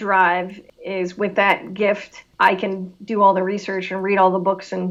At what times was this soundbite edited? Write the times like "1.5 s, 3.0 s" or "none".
none